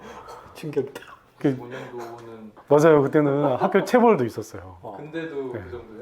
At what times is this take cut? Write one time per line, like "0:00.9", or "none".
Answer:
none